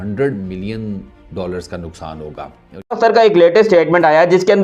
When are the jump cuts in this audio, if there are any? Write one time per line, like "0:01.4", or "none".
none